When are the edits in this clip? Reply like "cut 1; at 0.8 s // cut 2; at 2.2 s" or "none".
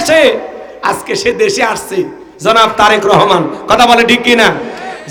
none